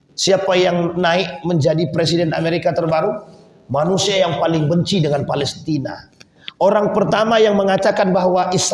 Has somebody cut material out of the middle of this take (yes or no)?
no